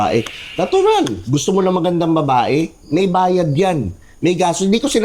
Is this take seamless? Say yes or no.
yes